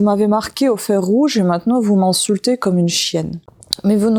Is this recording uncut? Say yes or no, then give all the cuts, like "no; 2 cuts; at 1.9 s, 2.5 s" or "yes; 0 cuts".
yes; 0 cuts